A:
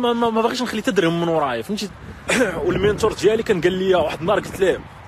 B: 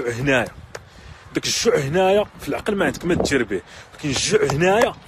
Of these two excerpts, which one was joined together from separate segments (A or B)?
A